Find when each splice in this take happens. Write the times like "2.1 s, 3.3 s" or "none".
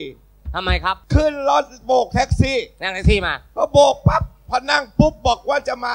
1.0 s